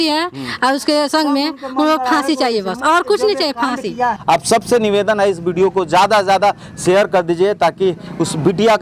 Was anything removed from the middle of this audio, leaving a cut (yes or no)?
yes